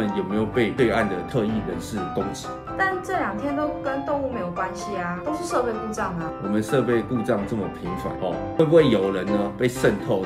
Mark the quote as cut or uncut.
uncut